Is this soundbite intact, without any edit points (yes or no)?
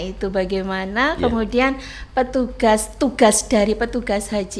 yes